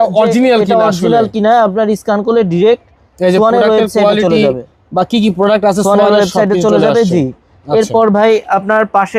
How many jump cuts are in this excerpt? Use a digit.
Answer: 0